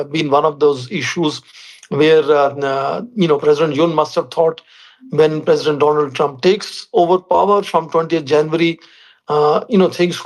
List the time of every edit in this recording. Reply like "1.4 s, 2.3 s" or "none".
none